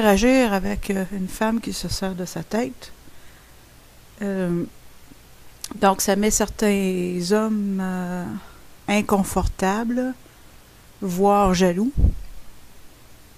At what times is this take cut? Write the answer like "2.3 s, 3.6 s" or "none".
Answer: 10.2 s